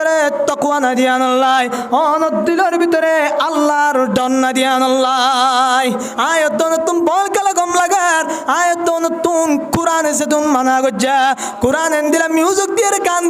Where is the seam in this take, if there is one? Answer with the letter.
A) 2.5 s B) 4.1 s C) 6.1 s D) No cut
C